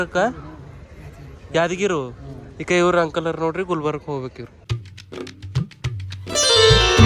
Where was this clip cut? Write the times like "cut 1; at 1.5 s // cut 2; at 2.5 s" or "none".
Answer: cut 1; at 4.6 s